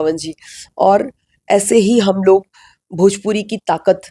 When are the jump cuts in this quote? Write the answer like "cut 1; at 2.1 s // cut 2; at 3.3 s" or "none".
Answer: none